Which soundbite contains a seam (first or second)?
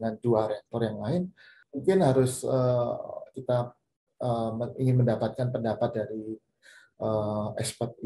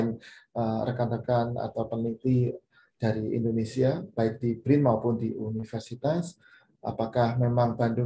first